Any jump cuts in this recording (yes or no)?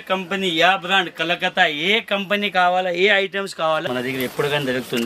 yes